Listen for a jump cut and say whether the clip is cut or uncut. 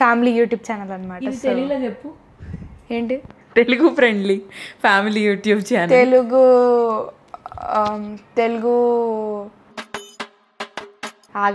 uncut